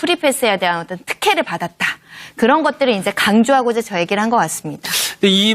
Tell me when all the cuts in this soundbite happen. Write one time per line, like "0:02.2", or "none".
0:02.3